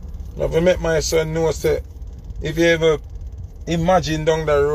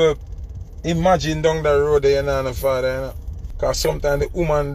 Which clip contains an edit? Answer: second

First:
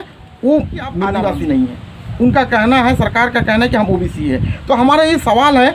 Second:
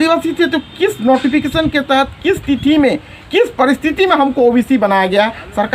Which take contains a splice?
first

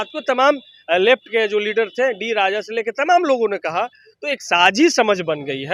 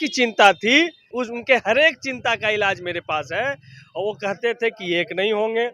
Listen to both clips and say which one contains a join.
second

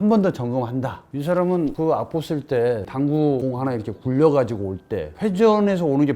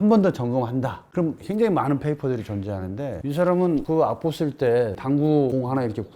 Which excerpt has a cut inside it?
first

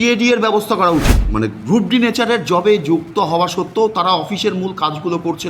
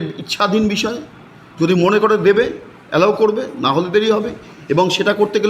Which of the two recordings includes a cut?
first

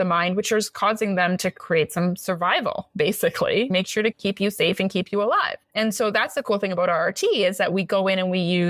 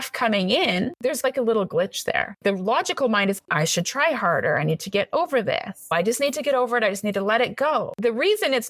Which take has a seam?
second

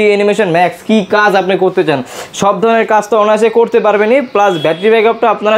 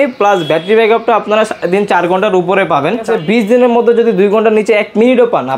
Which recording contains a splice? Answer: second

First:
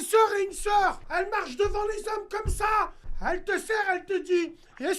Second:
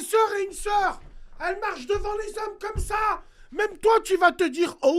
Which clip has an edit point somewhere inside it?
first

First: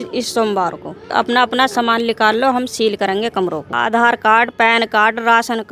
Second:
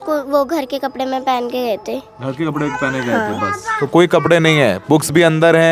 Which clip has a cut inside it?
first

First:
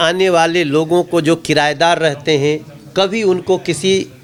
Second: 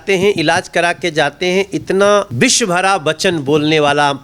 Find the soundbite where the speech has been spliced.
second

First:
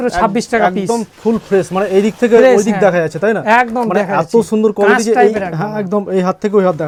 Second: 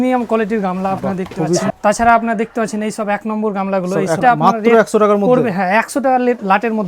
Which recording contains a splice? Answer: second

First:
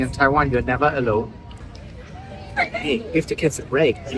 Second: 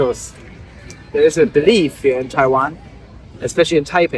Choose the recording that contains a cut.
first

